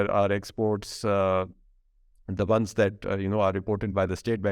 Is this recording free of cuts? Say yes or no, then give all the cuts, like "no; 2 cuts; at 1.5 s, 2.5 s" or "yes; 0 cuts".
yes; 0 cuts